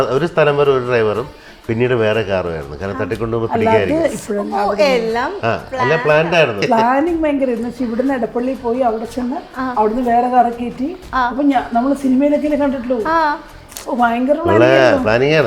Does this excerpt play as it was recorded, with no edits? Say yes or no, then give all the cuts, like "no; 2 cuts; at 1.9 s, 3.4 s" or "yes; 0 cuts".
no; 1 cut; at 6.6 s